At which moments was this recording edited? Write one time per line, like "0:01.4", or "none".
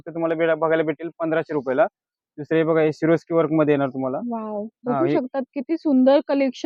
none